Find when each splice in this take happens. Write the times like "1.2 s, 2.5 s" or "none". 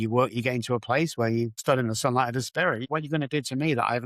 1.6 s, 2.8 s

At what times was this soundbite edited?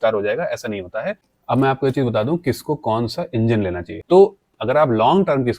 1.3 s, 3.9 s

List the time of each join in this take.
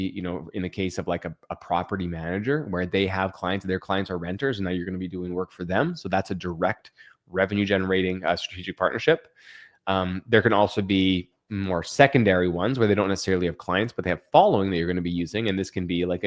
none

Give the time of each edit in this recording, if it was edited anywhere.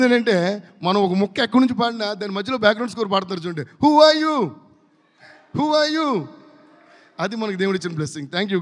none

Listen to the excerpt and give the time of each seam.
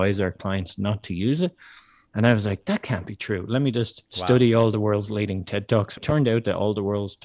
4.0 s, 6.0 s

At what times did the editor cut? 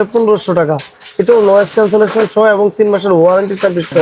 none

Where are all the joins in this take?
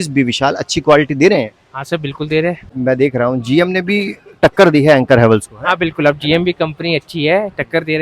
2.7 s

